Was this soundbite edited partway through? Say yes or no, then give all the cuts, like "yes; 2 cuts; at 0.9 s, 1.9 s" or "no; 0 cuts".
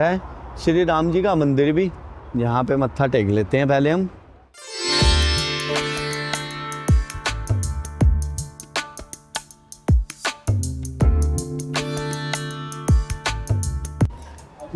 no; 0 cuts